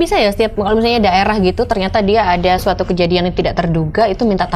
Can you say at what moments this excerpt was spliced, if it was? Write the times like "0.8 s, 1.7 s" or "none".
none